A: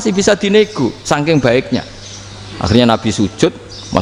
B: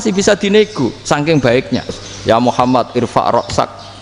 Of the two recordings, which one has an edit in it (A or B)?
B